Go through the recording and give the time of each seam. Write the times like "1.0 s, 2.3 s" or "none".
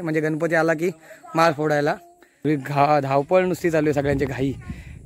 2.3 s

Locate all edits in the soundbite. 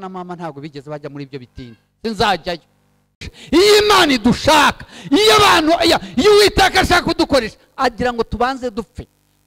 3.3 s

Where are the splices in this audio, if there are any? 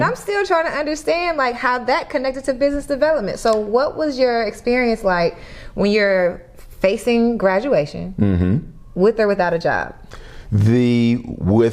none

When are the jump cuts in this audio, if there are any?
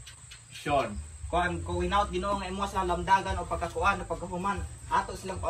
none

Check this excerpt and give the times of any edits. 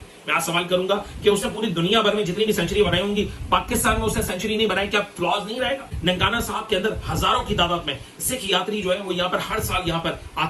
6.0 s

